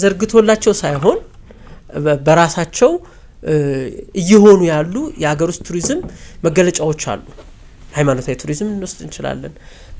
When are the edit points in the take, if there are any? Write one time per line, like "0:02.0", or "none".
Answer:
none